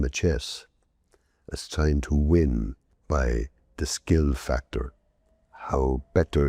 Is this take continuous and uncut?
no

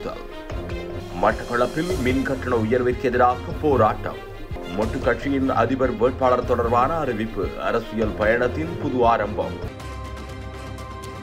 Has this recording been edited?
yes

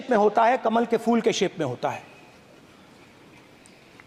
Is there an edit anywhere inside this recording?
no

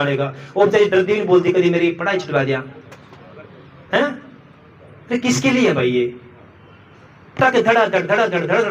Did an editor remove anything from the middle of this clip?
no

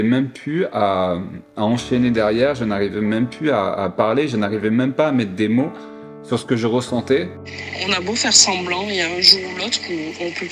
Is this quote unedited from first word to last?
yes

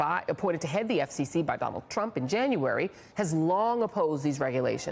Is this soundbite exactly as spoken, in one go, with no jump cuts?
yes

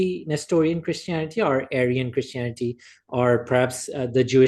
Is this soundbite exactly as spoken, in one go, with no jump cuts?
yes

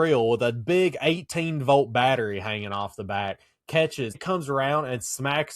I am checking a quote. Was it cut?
yes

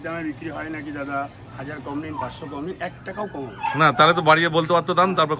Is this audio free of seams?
yes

